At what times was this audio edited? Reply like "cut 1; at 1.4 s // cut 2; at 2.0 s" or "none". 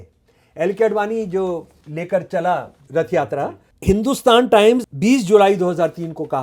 cut 1; at 1.8 s // cut 2; at 2.8 s // cut 3; at 3.7 s // cut 4; at 4.9 s